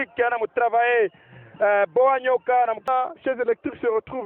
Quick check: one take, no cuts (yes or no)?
no